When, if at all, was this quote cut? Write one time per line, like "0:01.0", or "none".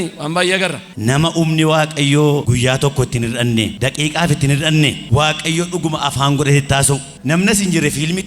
0:00.8
0:02.5
0:03.7
0:05.0
0:07.1